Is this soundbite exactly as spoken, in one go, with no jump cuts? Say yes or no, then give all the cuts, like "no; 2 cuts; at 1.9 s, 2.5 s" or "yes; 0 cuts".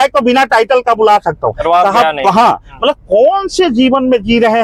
yes; 0 cuts